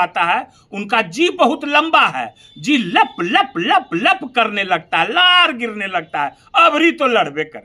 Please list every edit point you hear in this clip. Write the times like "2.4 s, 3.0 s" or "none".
none